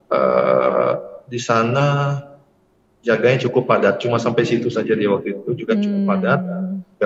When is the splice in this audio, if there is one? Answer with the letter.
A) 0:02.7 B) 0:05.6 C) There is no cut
C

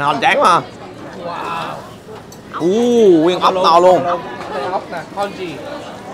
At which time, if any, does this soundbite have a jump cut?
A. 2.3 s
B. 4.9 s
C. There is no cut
C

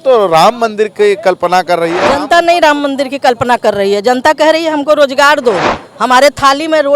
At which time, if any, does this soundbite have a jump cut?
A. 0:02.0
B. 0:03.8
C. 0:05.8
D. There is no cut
A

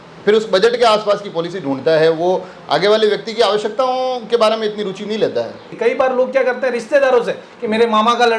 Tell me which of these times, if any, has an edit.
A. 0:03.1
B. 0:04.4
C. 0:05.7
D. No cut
C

